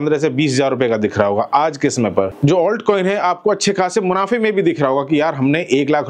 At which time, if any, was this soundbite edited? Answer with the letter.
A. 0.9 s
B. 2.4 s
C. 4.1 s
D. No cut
B